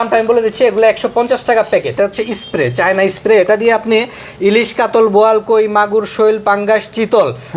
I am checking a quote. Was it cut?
yes; 1 cut; at 1.9 s

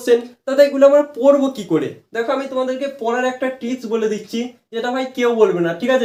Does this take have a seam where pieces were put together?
no; 0 cuts

